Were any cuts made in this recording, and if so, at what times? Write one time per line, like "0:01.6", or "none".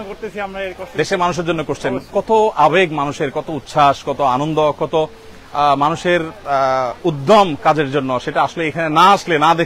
none